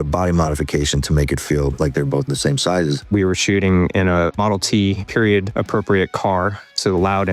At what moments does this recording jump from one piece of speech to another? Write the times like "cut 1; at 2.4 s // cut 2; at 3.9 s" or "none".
cut 1; at 3.1 s